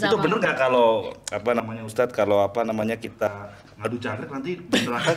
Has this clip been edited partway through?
no; 0 cuts

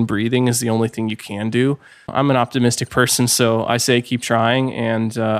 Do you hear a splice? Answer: yes; 1 cut; at 1.9 s

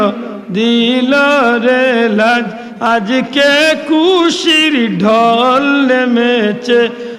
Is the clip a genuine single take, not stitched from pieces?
yes; 0 cuts

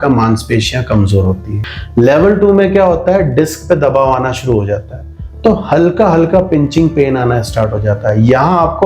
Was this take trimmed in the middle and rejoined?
yes; 1 cut; at 1.5 s

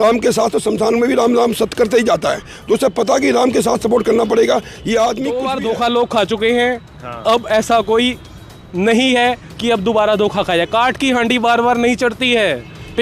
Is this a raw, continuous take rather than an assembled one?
no; 1 cut; at 5.4 s

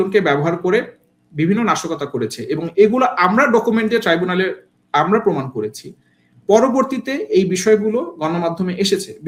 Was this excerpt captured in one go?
yes; 0 cuts

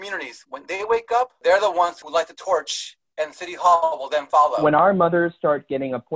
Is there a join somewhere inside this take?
yes; 3 cuts; at 1.3 s, 2.0 s, 4.6 s

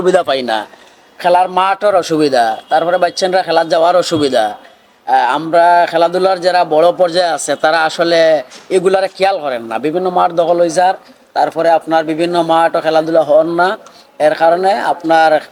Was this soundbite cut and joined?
no; 0 cuts

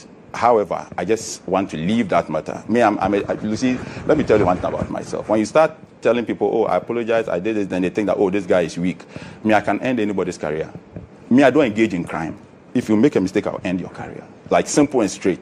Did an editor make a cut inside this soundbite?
no; 0 cuts

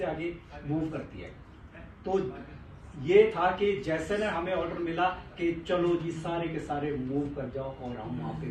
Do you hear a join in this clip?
no; 0 cuts

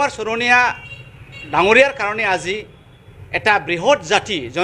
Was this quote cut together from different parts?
no; 0 cuts

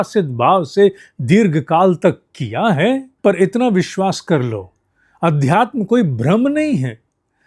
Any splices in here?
yes; 1 cut; at 3.1 s

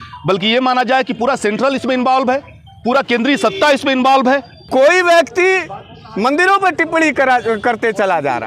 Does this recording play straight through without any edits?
no; 1 cut; at 4.5 s

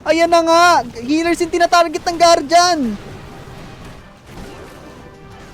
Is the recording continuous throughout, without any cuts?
yes; 0 cuts

